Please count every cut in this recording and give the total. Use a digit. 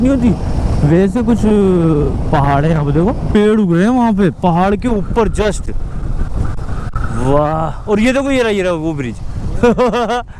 1